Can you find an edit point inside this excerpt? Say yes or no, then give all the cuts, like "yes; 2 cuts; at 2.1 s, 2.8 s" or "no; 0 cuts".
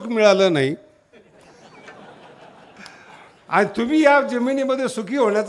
no; 0 cuts